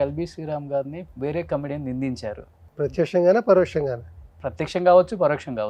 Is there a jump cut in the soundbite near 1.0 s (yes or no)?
yes